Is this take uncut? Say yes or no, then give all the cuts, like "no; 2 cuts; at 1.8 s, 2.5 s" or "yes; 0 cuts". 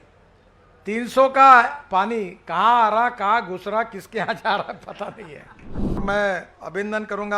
no; 1 cut; at 6.0 s